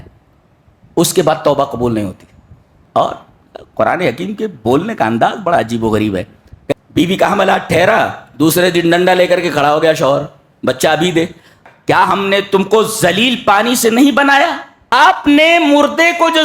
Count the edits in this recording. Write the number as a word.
four